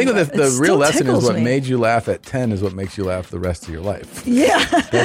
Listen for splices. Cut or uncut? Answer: uncut